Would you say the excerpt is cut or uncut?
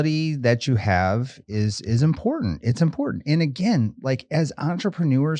uncut